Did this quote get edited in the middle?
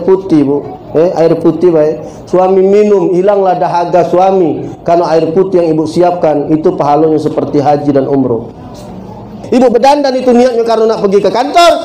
yes; 1 cut; at 9.4 s

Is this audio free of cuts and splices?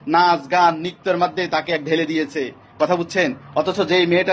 yes; 0 cuts

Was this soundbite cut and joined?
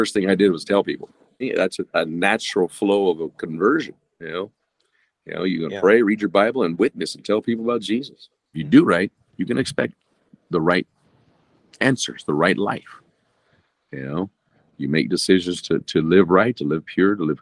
yes; 2 cuts; at 1.4 s, 8.6 s

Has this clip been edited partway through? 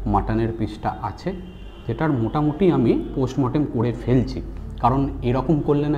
no; 0 cuts

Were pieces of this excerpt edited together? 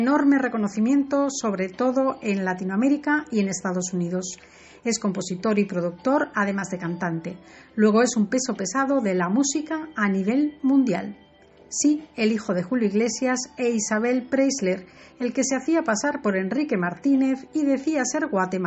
yes; 1 cut; at 6.9 s

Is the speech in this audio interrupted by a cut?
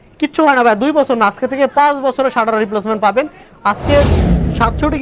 yes; 1 cut; at 4.1 s

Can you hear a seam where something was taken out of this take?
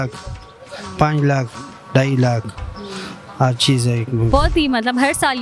yes; 1 cut; at 4.3 s

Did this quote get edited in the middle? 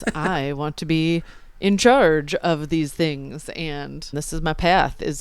yes; 1 cut; at 4.2 s

